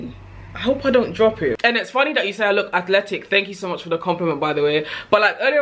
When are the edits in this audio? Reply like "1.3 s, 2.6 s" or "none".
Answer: 1.6 s